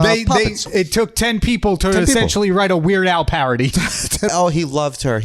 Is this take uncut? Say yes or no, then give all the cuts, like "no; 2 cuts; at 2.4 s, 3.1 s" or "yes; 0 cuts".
no; 1 cut; at 4.3 s